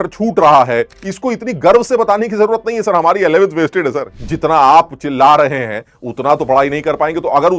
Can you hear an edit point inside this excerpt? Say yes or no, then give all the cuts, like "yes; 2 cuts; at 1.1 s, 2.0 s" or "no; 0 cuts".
yes; 2 cuts; at 0.9 s, 4.1 s